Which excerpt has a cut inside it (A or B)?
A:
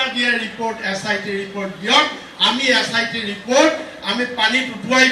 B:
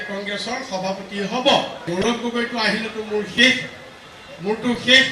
B